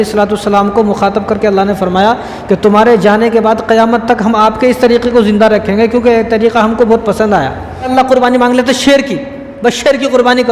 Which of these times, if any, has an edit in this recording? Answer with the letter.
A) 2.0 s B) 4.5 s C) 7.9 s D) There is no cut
C